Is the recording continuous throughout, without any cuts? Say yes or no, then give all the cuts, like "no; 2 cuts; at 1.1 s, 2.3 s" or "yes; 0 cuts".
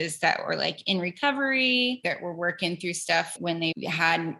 no; 1 cut; at 3.5 s